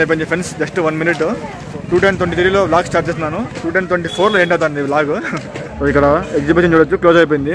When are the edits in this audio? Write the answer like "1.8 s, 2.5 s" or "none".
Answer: 1.6 s, 5.6 s